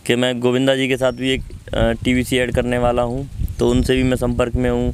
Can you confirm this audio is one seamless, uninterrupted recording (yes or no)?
yes